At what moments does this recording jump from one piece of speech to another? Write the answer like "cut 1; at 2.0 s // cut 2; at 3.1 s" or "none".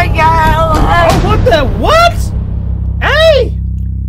none